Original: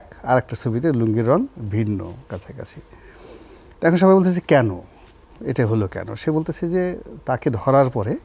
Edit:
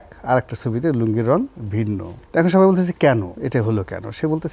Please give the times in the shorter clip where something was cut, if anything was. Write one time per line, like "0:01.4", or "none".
0:02.1
0:03.3

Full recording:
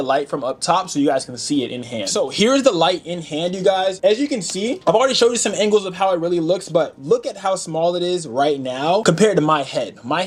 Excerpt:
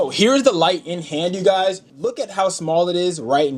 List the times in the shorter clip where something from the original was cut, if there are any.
0:01.8

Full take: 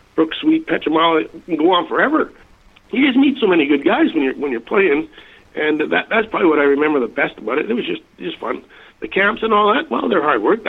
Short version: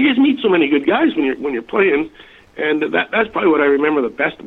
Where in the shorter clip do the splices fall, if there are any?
none

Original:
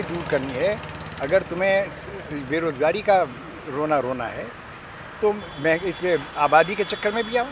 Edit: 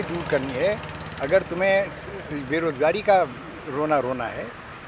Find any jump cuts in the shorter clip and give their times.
none

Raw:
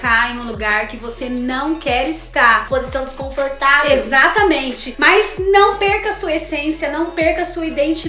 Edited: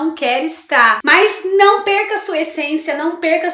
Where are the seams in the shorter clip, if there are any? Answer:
0:01.0

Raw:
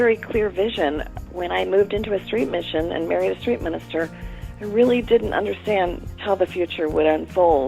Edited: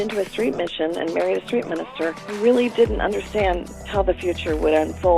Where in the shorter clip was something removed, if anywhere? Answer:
0:02.2

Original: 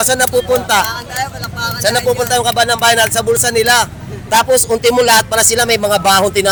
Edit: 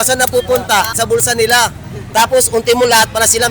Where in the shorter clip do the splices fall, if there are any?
0:00.9

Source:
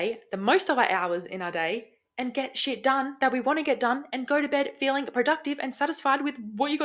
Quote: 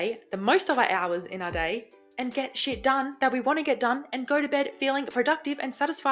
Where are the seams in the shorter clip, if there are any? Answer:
none

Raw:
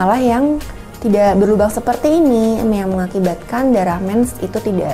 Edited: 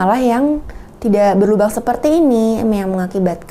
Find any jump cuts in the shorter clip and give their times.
none

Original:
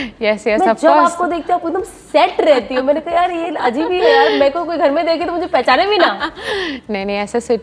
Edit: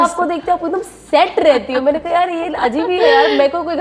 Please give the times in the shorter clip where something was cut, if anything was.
none

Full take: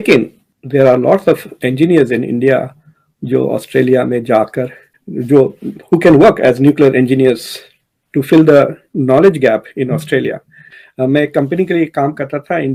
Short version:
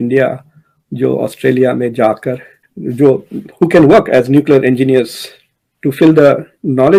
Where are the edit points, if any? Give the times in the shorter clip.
none

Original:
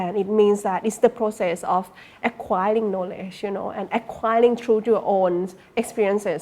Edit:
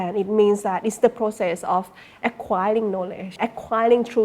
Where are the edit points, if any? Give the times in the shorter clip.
0:03.3

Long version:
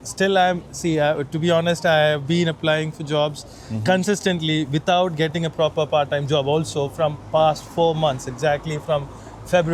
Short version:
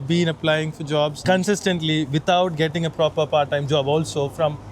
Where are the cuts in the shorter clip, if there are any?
0:01.2

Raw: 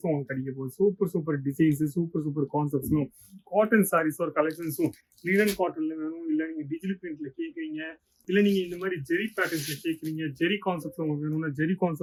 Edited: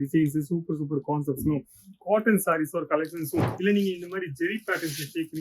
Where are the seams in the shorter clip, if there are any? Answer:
0:03.5

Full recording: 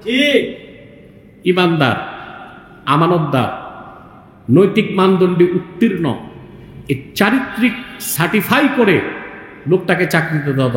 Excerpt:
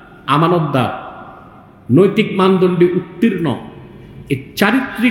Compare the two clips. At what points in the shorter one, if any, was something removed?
none

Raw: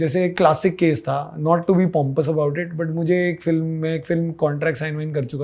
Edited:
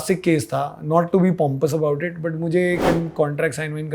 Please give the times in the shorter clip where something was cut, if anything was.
0:02.8

